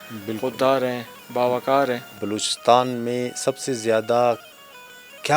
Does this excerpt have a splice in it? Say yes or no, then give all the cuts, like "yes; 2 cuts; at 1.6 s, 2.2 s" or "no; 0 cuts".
yes; 1 cut; at 2.2 s